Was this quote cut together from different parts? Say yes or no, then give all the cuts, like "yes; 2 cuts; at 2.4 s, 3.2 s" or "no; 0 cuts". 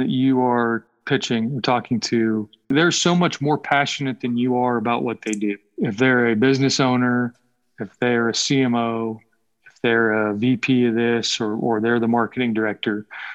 yes; 3 cuts; at 0.9 s, 2.7 s, 5.7 s